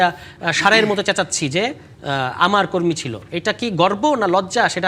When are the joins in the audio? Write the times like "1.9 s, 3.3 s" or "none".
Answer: none